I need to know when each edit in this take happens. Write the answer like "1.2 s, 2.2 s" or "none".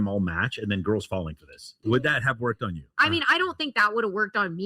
1.8 s

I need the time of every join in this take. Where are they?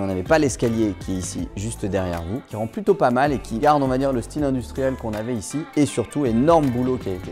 2.4 s, 3.6 s

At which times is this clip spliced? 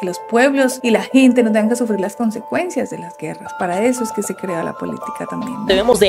none

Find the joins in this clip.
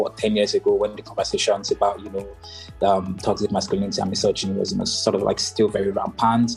none

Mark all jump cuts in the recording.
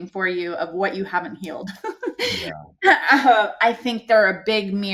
none

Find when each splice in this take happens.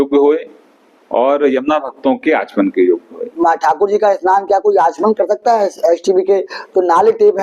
3.4 s

